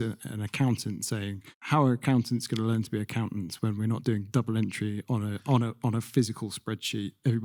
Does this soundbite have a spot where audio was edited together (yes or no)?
no